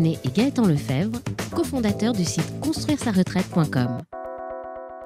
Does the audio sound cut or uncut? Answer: cut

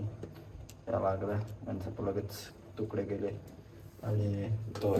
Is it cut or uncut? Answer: uncut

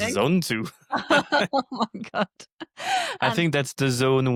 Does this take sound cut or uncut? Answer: uncut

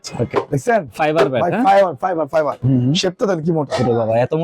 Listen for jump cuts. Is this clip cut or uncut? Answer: cut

